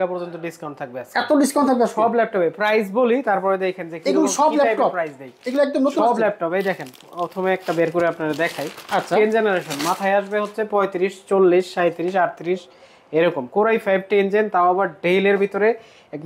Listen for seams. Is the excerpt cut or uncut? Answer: uncut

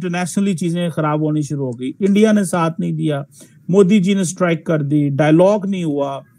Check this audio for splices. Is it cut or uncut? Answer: uncut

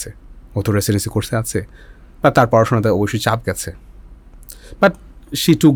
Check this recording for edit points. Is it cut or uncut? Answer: uncut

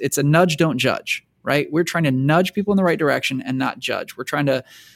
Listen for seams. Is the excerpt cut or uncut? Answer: uncut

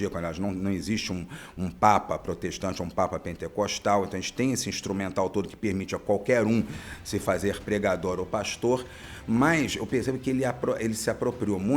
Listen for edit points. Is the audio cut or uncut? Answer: uncut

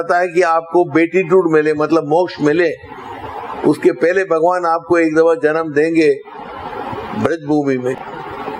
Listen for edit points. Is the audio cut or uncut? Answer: uncut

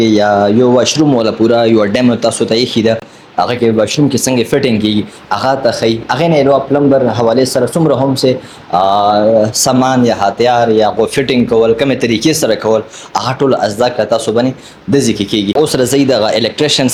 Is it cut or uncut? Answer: uncut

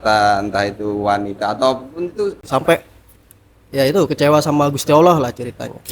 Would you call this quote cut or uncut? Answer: cut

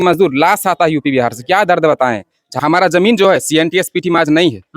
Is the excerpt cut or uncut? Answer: cut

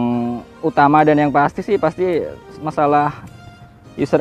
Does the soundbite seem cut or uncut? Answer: uncut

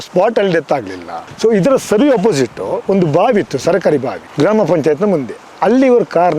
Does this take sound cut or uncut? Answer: cut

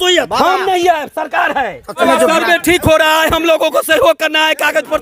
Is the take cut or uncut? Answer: cut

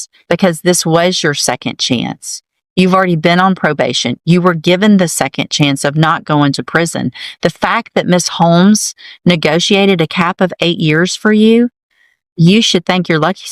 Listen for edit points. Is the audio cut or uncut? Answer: uncut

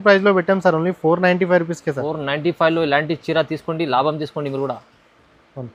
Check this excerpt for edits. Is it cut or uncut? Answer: uncut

